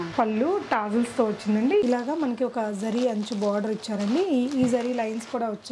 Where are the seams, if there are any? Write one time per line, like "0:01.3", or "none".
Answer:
0:01.8